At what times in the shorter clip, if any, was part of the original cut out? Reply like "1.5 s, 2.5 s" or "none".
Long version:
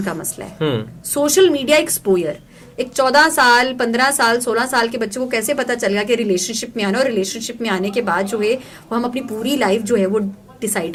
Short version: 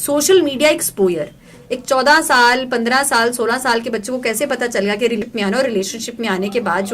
5.2 s